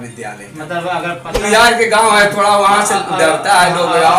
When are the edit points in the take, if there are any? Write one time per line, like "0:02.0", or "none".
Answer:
0:01.4